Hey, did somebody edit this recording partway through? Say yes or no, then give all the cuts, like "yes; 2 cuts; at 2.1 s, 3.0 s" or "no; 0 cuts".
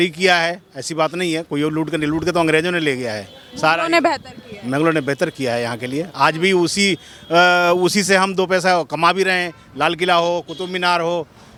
no; 0 cuts